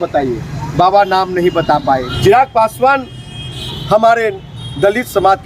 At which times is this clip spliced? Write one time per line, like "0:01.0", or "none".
0:02.1